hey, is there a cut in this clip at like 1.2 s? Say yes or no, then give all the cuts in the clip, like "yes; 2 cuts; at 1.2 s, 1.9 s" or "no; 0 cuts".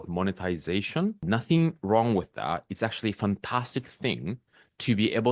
yes; 1 cut; at 1.2 s